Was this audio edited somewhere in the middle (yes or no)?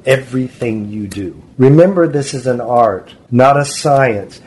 yes